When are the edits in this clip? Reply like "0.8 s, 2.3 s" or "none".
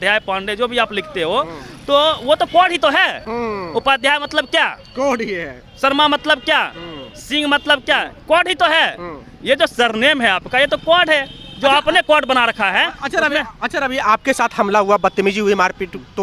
none